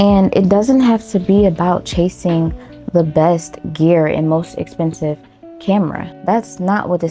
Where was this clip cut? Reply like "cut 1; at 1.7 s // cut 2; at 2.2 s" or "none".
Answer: none